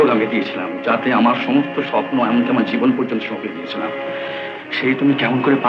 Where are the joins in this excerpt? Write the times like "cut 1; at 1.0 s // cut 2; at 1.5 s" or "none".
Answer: none